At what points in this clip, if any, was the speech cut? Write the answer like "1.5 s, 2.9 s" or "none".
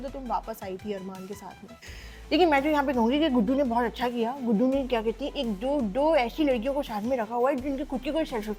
none